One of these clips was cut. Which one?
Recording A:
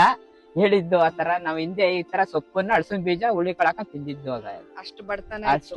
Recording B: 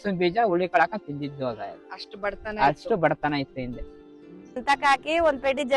B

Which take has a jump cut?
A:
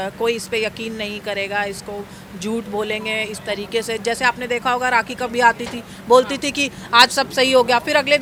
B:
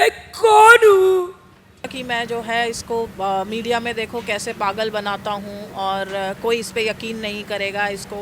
B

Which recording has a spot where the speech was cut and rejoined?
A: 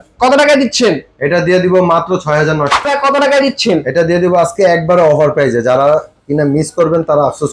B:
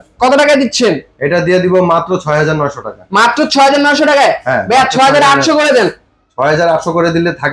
A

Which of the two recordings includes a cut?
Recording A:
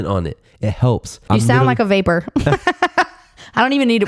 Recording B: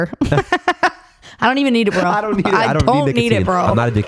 A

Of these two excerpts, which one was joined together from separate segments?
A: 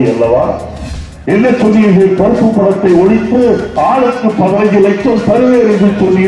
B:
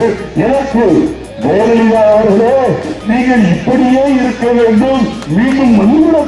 B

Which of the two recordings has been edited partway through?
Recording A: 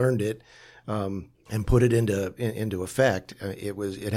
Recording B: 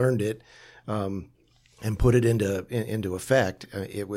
A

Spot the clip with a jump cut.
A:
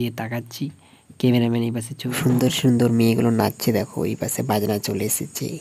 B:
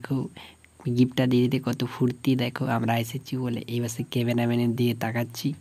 A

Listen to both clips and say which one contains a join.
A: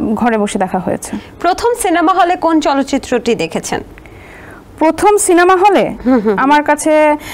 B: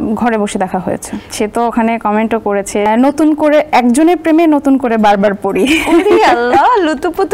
B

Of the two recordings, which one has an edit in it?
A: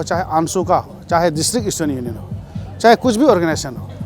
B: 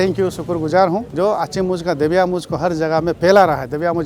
B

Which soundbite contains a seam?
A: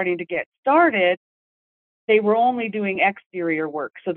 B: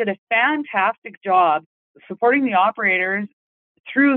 B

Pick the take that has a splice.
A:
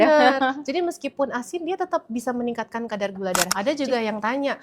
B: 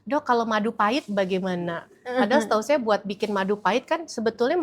A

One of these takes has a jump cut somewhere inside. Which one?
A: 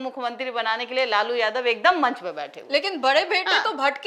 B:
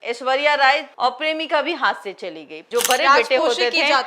B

